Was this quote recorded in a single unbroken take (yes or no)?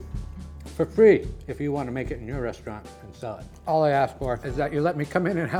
yes